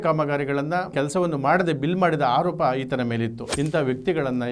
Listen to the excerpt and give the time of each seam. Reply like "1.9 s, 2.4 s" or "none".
0.9 s, 3.4 s